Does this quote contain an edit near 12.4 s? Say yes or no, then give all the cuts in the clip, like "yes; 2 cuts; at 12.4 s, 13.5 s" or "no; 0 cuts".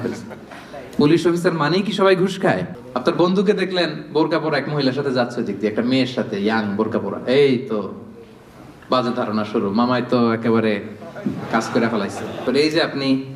yes; 2 cuts; at 2.8 s, 12.4 s